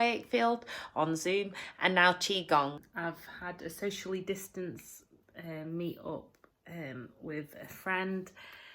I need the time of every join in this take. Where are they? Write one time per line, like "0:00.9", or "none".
0:02.9